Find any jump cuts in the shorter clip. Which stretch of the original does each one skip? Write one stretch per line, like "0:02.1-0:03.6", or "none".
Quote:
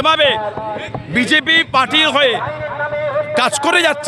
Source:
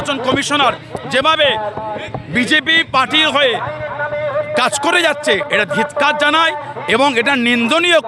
none